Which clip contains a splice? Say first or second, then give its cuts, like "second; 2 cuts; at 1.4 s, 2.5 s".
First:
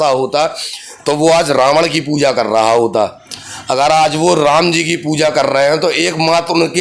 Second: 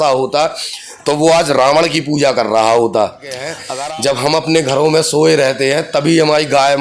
second; 1 cut; at 3.6 s